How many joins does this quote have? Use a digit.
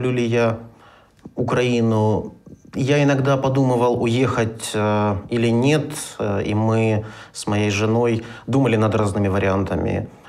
1